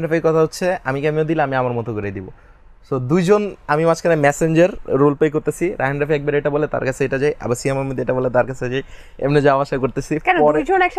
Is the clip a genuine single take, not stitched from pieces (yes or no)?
yes